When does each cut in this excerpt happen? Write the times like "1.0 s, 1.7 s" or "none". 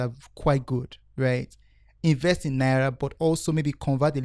none